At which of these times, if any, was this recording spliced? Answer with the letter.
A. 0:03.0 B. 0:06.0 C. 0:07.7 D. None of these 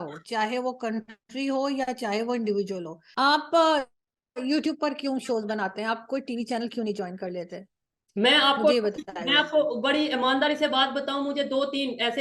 A